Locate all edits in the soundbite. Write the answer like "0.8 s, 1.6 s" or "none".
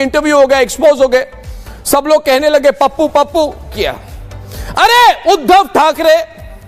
3.8 s